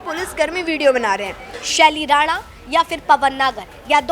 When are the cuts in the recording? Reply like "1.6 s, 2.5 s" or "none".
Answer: 1.6 s